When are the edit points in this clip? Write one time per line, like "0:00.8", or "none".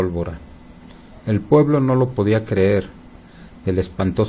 none